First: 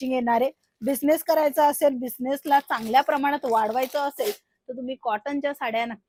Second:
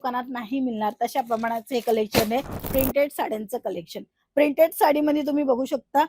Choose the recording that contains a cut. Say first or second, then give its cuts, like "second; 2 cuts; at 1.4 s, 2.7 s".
second; 1 cut; at 2.6 s